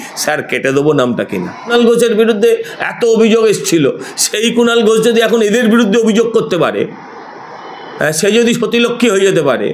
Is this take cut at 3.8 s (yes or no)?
no